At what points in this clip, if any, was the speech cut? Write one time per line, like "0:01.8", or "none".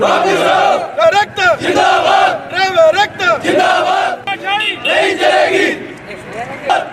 0:04.2